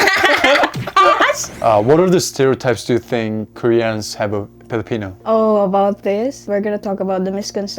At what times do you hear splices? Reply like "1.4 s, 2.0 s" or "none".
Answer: 1.6 s

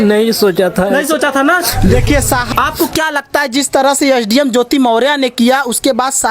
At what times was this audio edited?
2.5 s

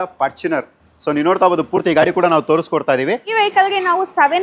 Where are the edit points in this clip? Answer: 3.3 s

